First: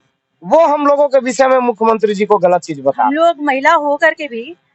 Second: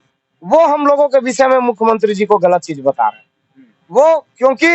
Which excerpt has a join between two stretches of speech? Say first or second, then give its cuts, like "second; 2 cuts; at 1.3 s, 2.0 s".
first; 1 cut; at 3.1 s